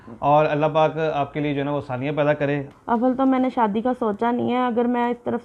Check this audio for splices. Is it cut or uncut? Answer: cut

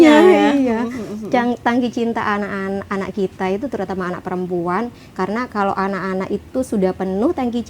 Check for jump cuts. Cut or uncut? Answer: uncut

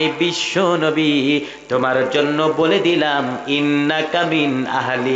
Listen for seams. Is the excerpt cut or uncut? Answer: uncut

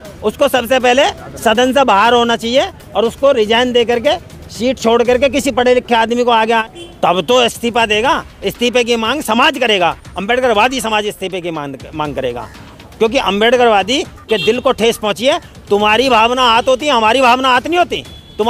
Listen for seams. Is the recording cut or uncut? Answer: cut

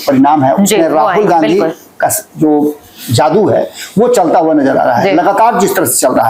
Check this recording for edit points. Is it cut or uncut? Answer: uncut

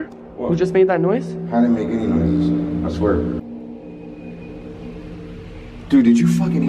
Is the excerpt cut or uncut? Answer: cut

